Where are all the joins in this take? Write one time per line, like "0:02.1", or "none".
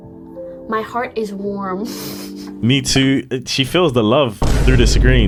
none